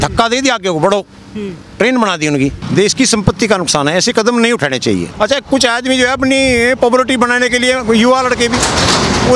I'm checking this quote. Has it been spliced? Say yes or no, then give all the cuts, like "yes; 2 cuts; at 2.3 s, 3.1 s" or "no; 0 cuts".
yes; 2 cuts; at 2.6 s, 5.1 s